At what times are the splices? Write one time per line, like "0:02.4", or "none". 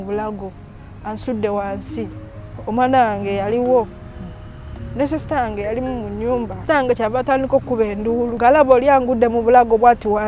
0:06.6
0:08.3